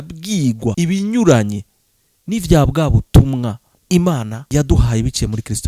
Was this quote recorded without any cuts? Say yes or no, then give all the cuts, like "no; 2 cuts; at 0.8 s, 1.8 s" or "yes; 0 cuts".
no; 3 cuts; at 0.7 s, 3.7 s, 4.4 s